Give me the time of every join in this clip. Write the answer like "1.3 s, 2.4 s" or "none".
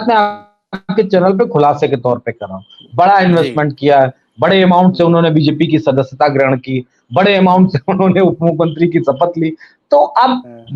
none

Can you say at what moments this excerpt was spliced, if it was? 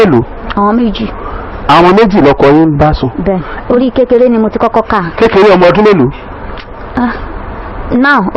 3.5 s

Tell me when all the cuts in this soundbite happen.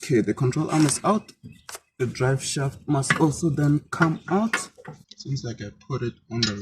5.1 s

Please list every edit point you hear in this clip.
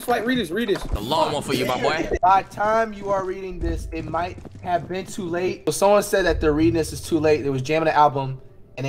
0.9 s, 2.1 s, 5.6 s

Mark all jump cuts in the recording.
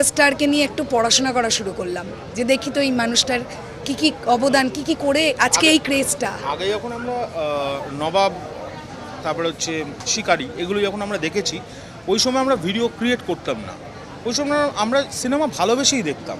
none

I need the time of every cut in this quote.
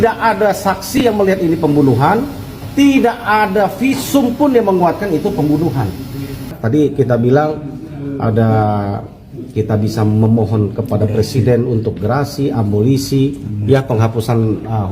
6.6 s

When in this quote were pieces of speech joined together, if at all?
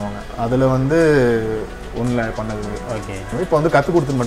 3.3 s

